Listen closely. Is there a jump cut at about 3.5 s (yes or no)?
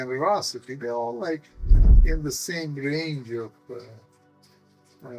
no